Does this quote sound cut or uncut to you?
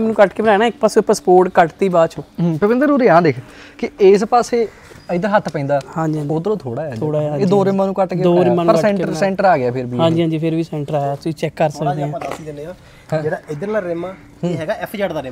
uncut